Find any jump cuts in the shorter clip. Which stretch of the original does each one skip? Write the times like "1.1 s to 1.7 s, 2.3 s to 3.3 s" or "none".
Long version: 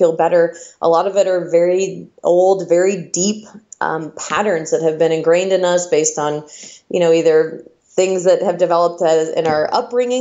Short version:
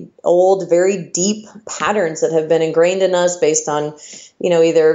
3.6 s to 4.1 s